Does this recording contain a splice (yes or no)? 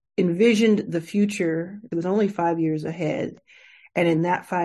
yes